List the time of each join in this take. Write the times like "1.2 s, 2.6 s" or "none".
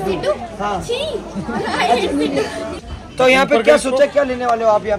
2.9 s